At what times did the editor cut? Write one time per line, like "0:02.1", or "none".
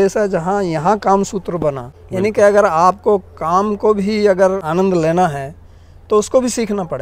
0:01.9
0:04.6